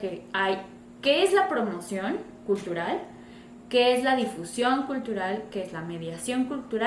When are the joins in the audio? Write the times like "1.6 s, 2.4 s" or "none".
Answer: none